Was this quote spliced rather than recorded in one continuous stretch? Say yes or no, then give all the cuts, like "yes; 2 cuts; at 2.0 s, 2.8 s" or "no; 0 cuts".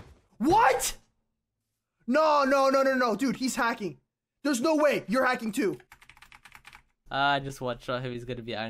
no; 0 cuts